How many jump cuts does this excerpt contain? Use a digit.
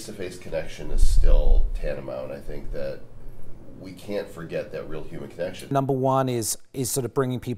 1